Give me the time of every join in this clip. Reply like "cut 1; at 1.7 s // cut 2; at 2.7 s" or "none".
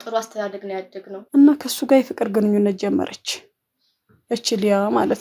cut 1; at 1.2 s

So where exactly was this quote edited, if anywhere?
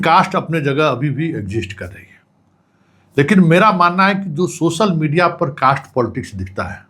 none

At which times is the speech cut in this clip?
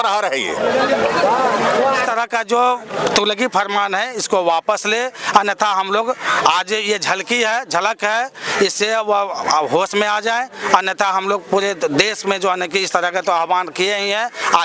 cut 1; at 2.0 s

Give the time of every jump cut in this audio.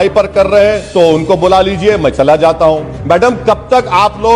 cut 1; at 2.9 s

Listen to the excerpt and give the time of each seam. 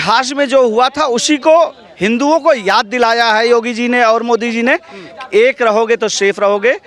none

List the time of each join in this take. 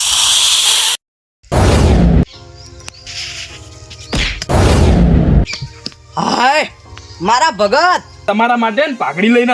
cut 1; at 0.9 s // cut 2; at 8.2 s

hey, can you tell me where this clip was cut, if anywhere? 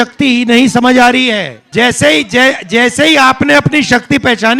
cut 1; at 1.6 s

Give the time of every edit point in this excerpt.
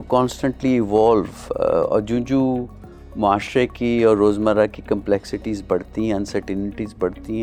none

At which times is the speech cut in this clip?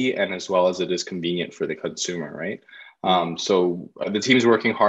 none

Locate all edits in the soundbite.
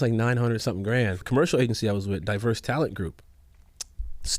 cut 1; at 1.2 s

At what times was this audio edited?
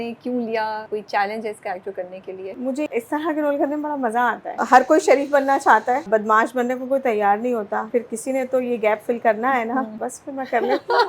cut 1; at 0.9 s // cut 2; at 2.7 s // cut 3; at 4.5 s // cut 4; at 6.0 s // cut 5; at 7.9 s // cut 6; at 9.9 s

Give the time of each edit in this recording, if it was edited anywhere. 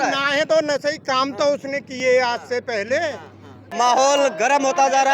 cut 1; at 3.6 s

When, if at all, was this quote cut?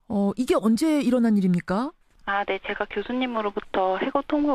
cut 1; at 3.2 s

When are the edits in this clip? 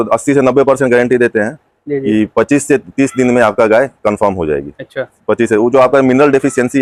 none

